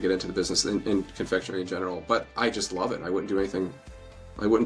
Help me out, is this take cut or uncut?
uncut